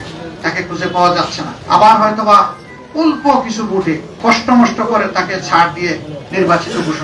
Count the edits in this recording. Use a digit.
0